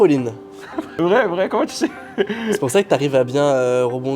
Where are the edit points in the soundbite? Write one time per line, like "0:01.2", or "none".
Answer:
0:00.9